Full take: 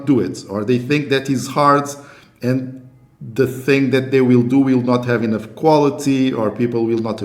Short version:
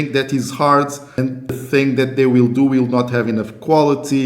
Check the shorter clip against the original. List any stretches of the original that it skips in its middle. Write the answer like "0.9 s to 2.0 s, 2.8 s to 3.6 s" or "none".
2.5 s to 3.4 s